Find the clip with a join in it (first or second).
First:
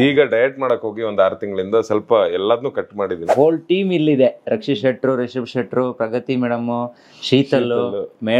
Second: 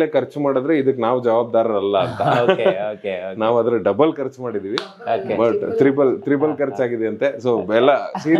first